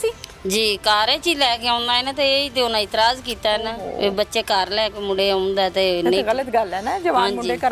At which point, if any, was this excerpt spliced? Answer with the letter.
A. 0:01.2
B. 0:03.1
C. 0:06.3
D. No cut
D